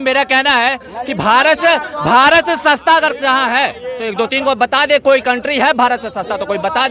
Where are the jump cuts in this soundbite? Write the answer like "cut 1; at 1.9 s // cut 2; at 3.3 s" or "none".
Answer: none